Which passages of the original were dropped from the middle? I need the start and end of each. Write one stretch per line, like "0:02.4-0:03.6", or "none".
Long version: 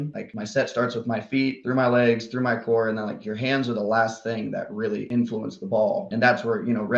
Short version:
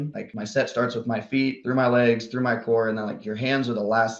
none